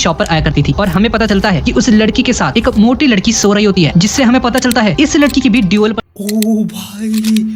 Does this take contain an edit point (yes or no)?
no